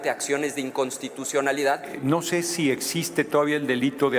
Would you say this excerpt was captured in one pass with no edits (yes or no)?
no